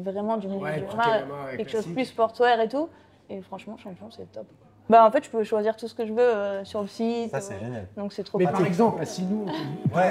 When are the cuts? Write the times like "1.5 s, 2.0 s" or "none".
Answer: 4.8 s